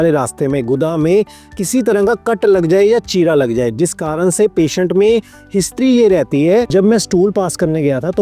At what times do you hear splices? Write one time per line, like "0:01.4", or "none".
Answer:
0:06.7